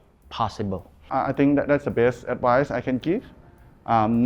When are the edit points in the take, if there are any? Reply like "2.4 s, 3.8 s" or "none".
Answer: 0.9 s